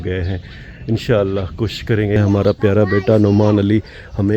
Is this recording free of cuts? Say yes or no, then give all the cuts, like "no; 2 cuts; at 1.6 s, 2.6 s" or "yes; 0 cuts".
no; 1 cut; at 2.2 s